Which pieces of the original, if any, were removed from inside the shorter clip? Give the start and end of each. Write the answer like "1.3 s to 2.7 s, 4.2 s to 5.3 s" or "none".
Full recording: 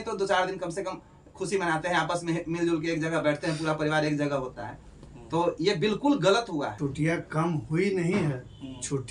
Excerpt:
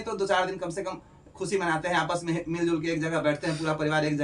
none